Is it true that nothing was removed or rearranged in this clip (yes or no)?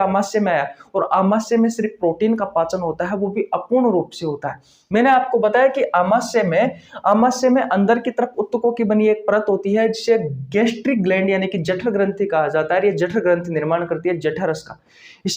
yes